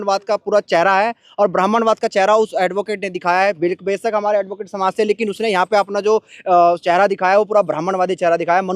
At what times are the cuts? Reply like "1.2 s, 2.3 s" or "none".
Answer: none